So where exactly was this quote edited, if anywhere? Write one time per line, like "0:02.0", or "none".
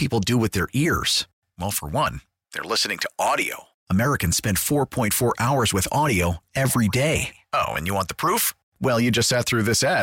none

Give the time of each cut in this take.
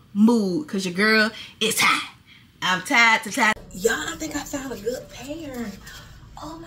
0:03.6

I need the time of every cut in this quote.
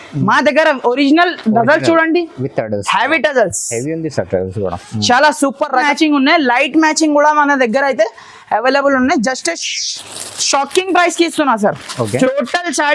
0:05.9
0:12.3

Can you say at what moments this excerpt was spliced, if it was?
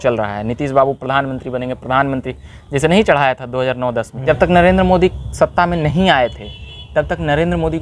0:04.2

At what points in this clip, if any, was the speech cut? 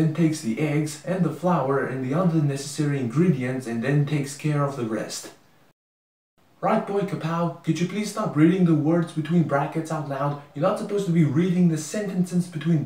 none

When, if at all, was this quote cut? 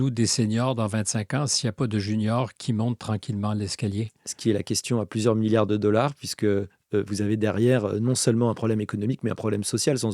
none

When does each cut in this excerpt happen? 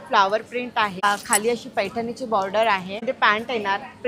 0:01.0
0:03.0

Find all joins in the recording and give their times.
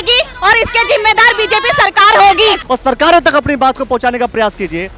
0:02.6

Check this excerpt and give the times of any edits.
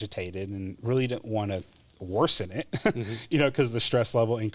none

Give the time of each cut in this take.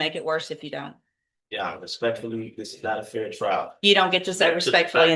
none

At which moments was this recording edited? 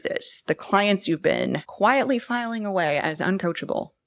0:01.6

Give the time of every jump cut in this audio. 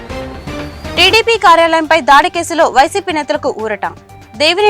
0:00.9

